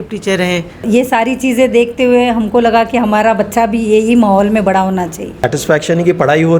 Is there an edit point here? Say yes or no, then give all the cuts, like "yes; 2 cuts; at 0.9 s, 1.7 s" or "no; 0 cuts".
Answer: yes; 2 cuts; at 0.8 s, 5.3 s